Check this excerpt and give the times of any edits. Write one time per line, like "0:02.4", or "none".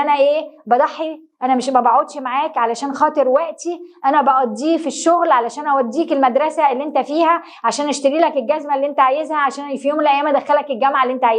none